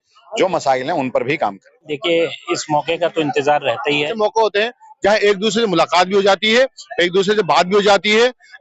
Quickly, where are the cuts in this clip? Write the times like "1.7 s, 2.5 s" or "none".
1.9 s, 4.1 s